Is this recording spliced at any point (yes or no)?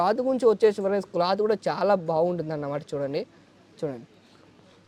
no